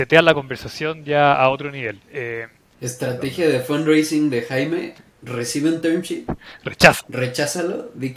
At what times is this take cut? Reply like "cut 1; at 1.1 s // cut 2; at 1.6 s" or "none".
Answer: cut 1; at 2.6 s